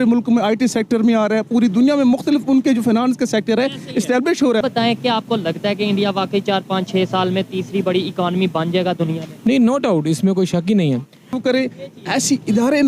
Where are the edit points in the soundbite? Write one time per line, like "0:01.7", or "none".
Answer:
0:04.6
0:11.4

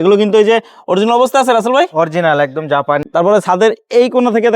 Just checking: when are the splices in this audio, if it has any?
0:03.0

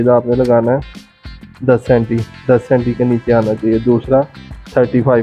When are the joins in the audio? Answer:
none

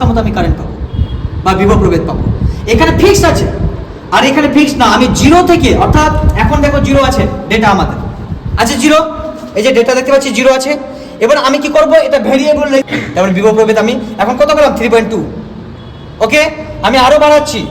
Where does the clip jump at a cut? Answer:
0:12.9

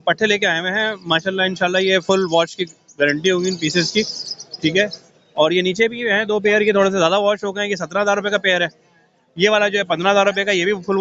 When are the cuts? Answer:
none

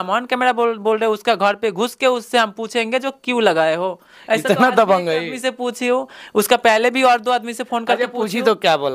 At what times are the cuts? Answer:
none

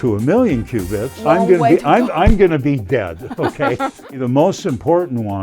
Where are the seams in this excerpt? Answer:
0:01.0
0:04.2

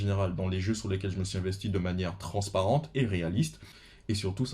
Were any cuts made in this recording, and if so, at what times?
none

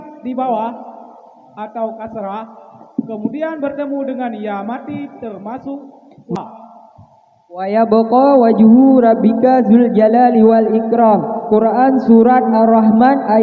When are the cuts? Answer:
0:06.4

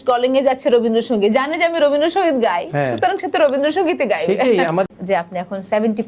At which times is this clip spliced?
0:04.9

